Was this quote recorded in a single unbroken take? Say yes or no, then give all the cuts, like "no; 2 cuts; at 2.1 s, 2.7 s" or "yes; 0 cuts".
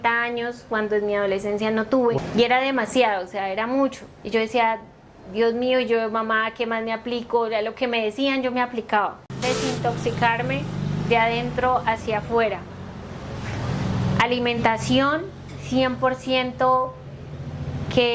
no; 1 cut; at 9.2 s